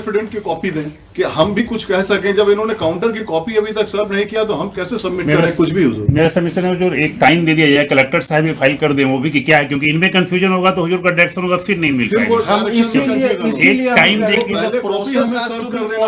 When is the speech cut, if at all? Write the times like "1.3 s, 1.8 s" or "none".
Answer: none